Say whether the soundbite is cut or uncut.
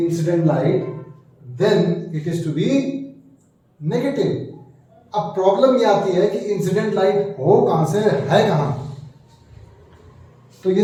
uncut